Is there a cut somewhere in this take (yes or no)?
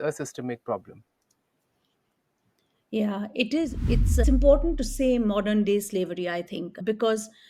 yes